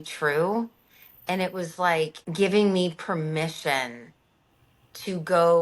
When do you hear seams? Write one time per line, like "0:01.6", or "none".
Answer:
0:02.2